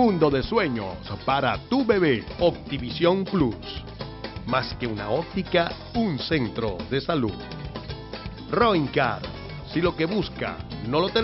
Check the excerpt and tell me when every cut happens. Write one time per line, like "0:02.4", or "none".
0:02.3